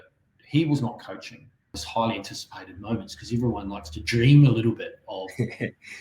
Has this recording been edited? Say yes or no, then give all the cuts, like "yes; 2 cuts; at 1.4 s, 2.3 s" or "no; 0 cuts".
yes; 1 cut; at 1.8 s